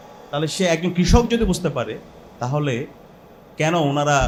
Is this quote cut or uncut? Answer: uncut